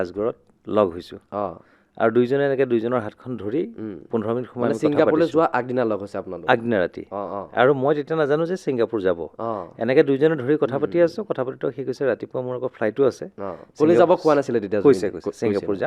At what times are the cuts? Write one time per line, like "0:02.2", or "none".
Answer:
none